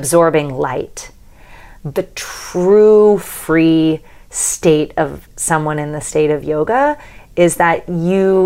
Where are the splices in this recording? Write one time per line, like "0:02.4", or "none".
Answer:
0:01.9
0:05.2

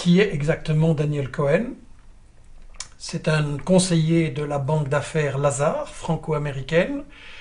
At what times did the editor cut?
0:03.9

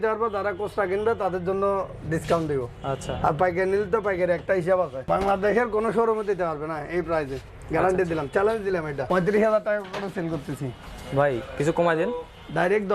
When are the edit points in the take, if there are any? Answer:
0:05.0
0:09.0

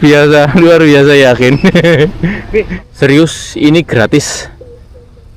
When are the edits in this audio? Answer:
0:02.8

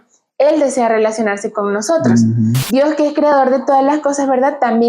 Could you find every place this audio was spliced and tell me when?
0:02.6

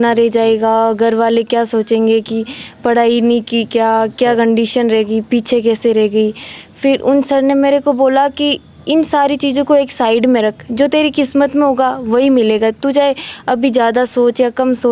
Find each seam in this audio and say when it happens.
none

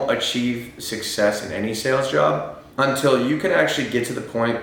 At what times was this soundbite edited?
0:02.6

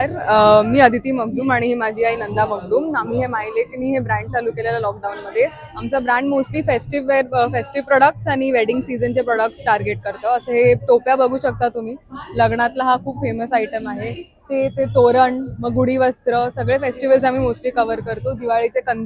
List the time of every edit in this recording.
none

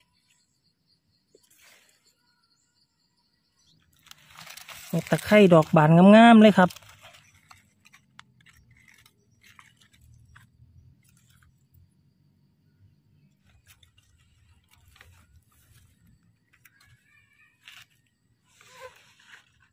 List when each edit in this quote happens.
none

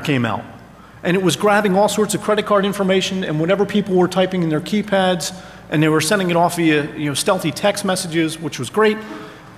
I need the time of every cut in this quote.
0:06.4

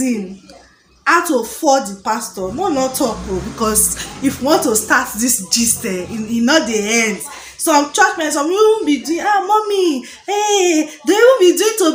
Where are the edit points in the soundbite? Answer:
none

